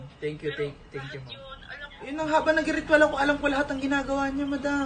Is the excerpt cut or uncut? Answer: cut